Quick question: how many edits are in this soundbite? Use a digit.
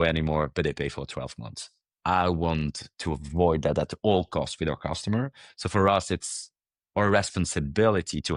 0